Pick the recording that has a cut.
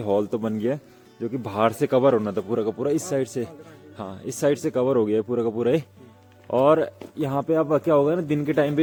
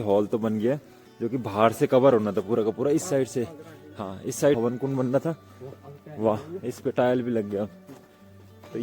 second; 1 cut; at 4.6 s

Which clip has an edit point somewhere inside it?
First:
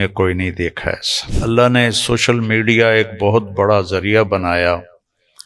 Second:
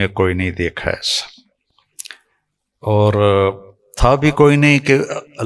first; 1 cut; at 1.3 s

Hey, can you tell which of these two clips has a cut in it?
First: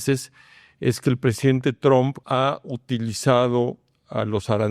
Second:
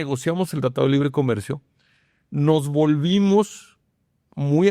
first; 1 cut; at 2.2 s

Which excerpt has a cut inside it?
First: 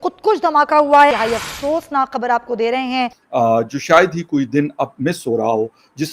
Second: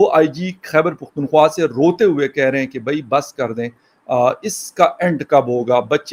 first; 2 cuts; at 1.1 s, 3.1 s

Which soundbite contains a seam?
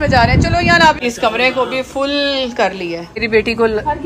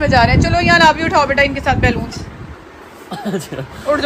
first; 2 cuts; at 1.0 s, 3.1 s

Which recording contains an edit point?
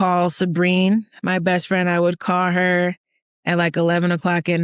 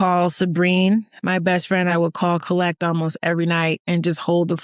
second; 1 cut; at 1.9 s

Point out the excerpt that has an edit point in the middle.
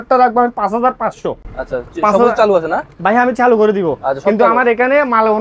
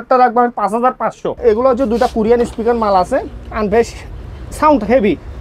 second; 1 cut; at 1.4 s

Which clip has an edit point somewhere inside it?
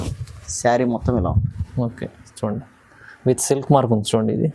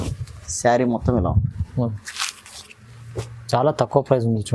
second; 1 cut; at 2.0 s

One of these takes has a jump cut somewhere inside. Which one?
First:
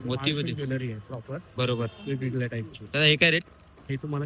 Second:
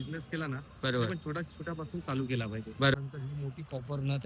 second; 1 cut; at 2.9 s

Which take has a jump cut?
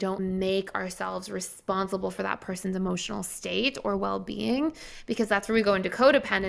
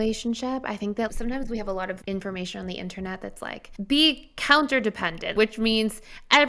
second; 2 cuts; at 2.0 s, 3.6 s

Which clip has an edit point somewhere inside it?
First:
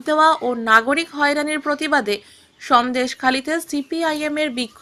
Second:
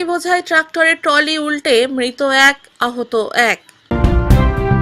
second; 1 cut; at 3.9 s

